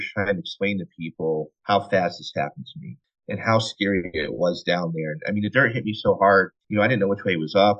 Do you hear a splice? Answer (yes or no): yes